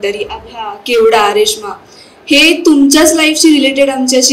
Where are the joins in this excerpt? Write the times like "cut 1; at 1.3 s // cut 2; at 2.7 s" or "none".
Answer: none